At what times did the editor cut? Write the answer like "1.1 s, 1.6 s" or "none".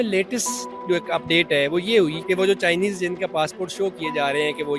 2.2 s